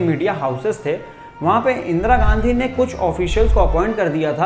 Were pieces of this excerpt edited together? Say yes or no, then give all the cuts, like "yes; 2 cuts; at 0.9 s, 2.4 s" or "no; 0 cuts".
no; 0 cuts